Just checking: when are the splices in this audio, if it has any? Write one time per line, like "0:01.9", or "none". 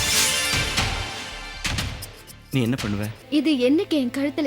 0:03.2